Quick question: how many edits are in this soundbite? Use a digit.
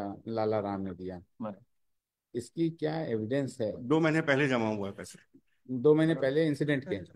0